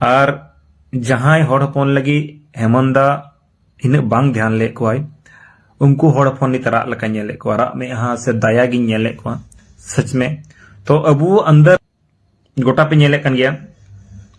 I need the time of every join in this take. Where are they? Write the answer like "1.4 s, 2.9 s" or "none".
11.8 s